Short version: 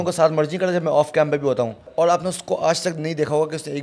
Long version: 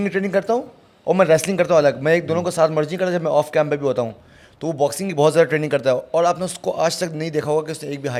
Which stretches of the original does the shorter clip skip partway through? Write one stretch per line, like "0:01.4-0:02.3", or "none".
0:04.3-0:06.0

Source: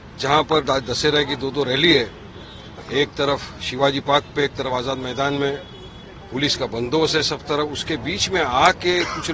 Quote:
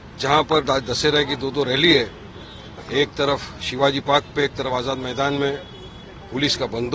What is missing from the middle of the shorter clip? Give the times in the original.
none

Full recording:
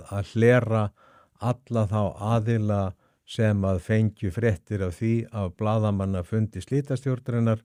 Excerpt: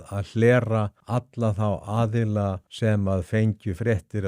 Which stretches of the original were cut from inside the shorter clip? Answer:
0:01.0-0:01.3
0:03.0-0:03.2

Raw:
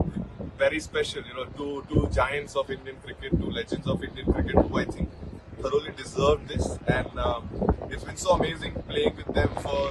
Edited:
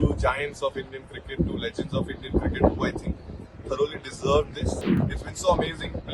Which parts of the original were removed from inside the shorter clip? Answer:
0:06.9-0:07.7

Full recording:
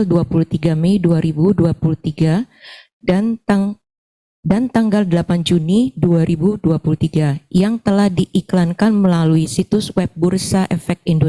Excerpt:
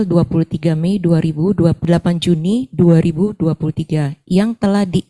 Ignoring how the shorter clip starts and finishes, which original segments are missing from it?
0:01.8-0:05.1

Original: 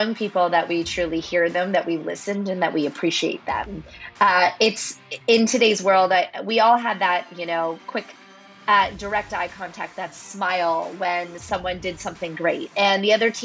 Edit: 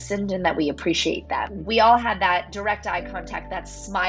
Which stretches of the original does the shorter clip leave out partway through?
0:03.8-0:06.4
0:07.3-0:09.0

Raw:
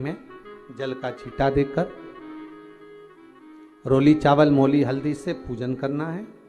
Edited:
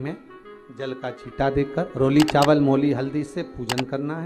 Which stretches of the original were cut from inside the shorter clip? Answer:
0:01.9-0:03.8

